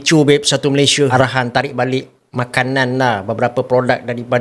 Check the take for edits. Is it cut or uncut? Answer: cut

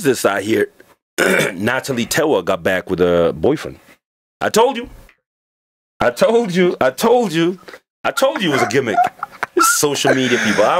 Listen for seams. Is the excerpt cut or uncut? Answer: uncut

